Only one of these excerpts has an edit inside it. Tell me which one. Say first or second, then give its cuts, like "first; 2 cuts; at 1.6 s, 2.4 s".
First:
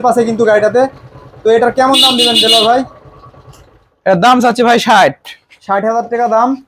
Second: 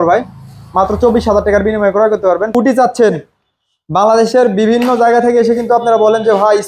second; 1 cut; at 2.5 s